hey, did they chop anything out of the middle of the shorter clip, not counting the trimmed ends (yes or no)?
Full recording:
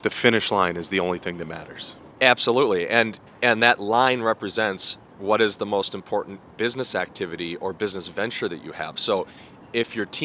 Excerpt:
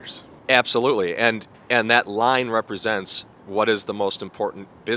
no